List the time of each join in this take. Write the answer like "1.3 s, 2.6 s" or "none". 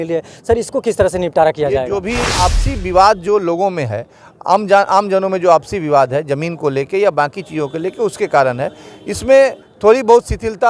2.3 s